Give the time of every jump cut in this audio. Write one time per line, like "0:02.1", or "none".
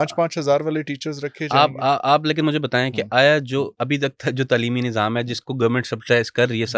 none